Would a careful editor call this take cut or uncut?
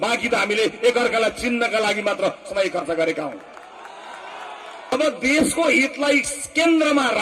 cut